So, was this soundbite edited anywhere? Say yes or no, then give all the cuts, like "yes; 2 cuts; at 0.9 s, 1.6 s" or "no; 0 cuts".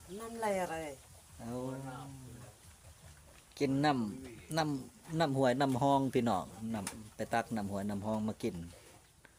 no; 0 cuts